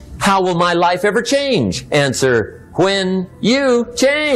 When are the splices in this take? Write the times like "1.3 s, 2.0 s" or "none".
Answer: none